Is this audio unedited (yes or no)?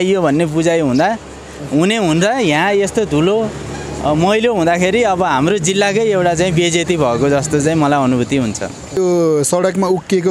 no